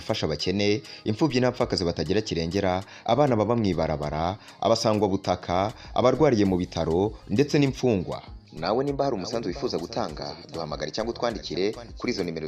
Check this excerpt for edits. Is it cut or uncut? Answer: uncut